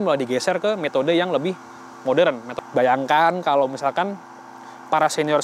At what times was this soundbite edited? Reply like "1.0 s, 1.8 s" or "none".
2.5 s

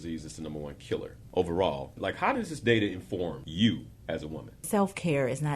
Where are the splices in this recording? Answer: 1.2 s, 2.0 s, 3.4 s, 4.6 s

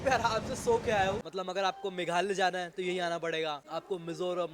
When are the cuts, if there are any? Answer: 1.2 s, 3.6 s

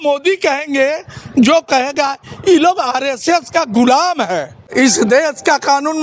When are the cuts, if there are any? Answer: 4.6 s

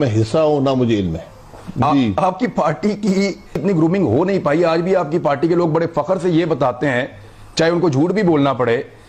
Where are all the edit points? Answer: none

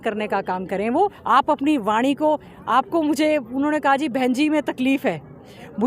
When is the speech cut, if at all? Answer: 1.2 s

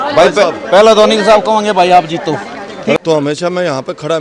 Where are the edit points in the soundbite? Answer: 2.9 s

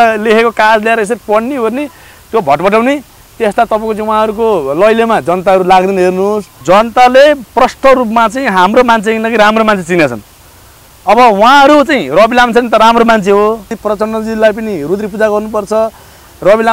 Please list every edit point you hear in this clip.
6.5 s, 13.7 s

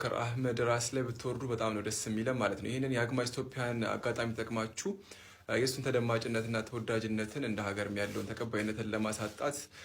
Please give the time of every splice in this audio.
none

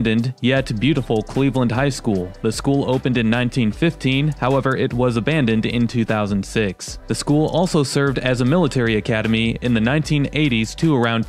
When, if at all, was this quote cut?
none

